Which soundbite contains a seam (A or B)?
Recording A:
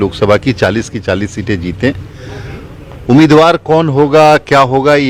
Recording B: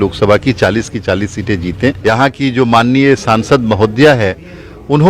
B